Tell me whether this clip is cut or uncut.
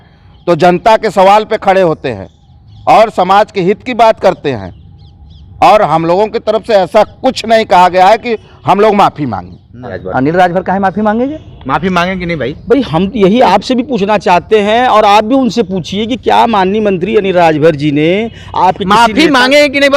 cut